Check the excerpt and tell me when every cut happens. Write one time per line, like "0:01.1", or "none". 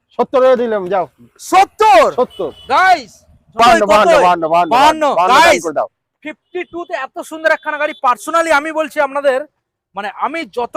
0:03.6